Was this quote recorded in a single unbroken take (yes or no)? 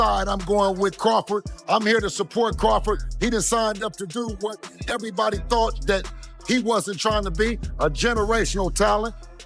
yes